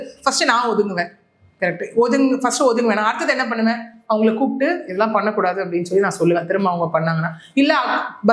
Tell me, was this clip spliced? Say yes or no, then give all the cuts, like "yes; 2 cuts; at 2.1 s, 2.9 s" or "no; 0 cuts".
no; 0 cuts